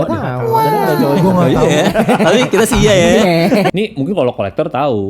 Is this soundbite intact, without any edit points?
no; 1 cut; at 3.7 s

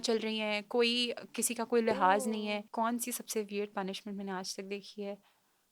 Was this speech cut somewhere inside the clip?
yes; 1 cut; at 2.7 s

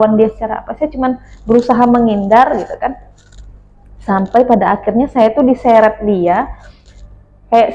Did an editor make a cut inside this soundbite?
no; 0 cuts

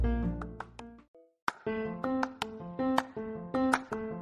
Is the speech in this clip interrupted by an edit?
yes; 1 cut; at 0.9 s

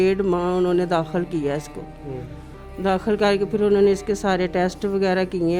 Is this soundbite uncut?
yes; 0 cuts

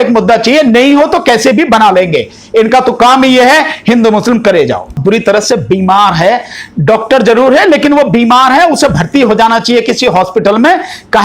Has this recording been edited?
yes; 1 cut; at 5.0 s

